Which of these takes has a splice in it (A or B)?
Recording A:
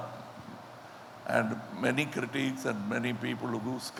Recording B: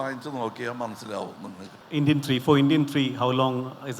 B